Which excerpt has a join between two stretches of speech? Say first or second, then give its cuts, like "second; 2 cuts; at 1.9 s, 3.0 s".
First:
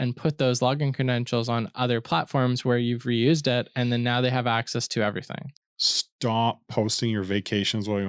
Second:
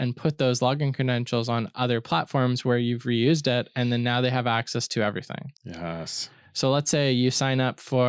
first; 1 cut; at 5.6 s